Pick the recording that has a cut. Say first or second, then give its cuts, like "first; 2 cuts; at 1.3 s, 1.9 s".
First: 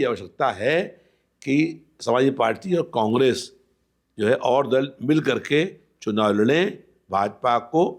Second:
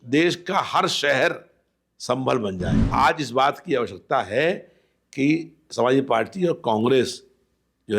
second; 1 cut; at 2.8 s